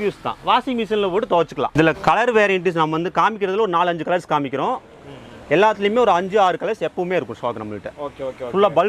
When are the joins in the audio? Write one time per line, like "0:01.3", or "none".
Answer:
0:01.7